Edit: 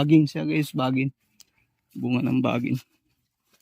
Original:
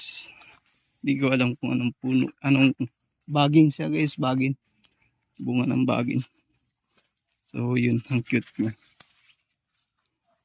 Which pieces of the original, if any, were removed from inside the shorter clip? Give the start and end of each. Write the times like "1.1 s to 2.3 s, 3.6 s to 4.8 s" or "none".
none